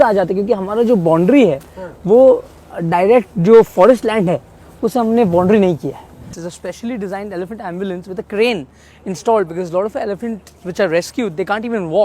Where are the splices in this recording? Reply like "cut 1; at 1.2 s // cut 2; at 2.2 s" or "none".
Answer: cut 1; at 6.3 s

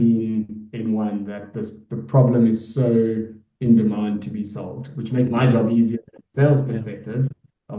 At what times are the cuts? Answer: none

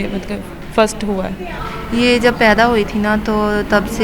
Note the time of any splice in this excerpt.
cut 1; at 1.5 s

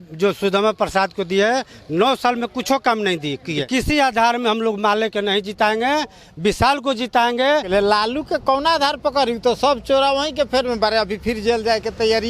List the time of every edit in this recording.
cut 1; at 3.6 s // cut 2; at 7.7 s

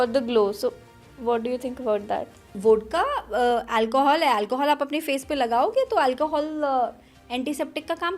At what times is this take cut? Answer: cut 1; at 2.5 s

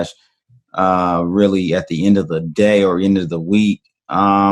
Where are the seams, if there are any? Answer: none

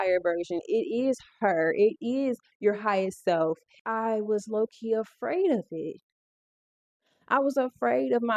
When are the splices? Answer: cut 1; at 3.7 s

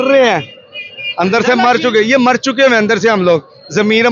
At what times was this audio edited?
none

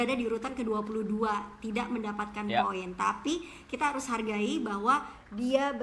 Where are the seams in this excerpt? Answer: none

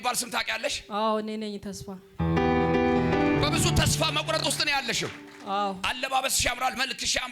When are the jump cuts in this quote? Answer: none

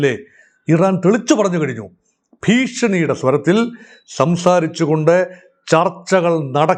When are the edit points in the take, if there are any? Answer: none

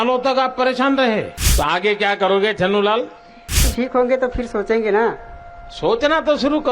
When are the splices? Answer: cut 1; at 1.5 s // cut 2; at 3.6 s

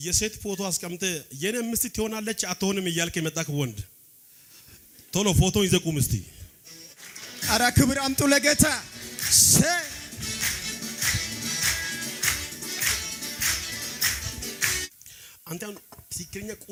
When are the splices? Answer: none

